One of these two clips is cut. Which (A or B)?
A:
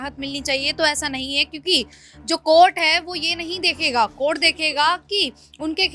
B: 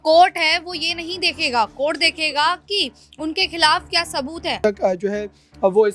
B